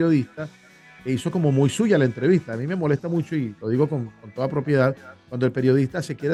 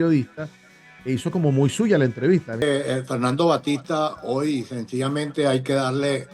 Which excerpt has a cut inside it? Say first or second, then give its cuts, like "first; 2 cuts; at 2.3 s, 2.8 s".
second; 1 cut; at 2.6 s